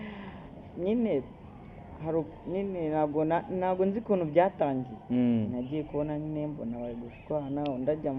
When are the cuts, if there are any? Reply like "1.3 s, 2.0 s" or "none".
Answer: none